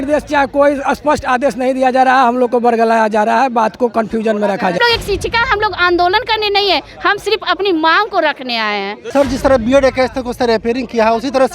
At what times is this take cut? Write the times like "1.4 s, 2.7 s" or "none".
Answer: 4.8 s, 9.0 s